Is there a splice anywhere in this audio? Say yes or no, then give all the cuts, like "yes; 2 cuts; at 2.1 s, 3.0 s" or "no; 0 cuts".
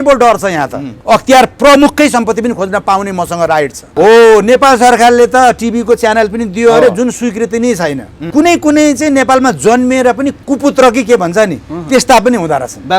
yes; 4 cuts; at 0.9 s, 3.9 s, 8.3 s, 10.4 s